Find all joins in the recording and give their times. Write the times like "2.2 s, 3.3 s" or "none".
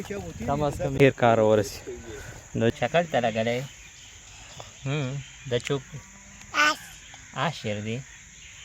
0.9 s, 2.7 s